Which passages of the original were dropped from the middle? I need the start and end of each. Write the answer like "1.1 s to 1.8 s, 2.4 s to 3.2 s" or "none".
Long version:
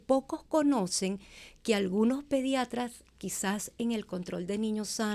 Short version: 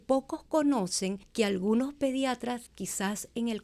1.2 s to 1.5 s, 3.0 s to 3.2 s